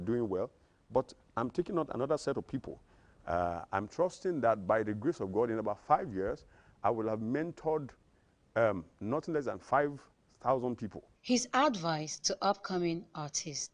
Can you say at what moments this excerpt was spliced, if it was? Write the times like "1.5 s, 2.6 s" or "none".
none